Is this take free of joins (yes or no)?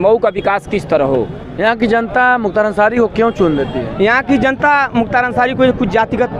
no